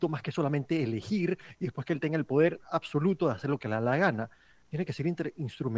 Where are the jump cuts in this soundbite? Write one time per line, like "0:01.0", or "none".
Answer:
none